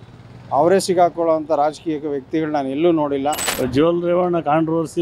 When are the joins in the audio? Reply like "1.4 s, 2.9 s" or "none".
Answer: 3.5 s